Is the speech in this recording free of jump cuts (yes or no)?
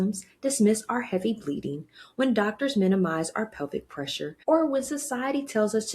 no